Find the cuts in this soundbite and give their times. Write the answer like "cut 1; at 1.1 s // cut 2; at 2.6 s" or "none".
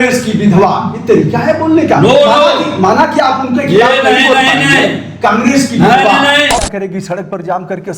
cut 1; at 6.6 s